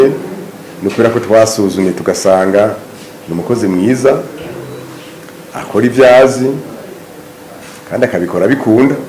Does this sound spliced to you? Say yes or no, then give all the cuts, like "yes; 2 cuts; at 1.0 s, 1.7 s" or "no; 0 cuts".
no; 0 cuts